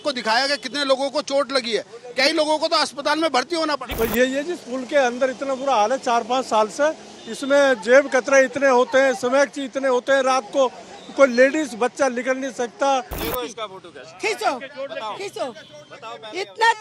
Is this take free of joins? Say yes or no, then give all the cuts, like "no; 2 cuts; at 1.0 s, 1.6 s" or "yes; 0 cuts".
no; 2 cuts; at 3.9 s, 13.2 s